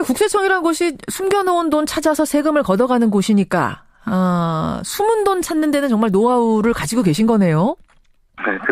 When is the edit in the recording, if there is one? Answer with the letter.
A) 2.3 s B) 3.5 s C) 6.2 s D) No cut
B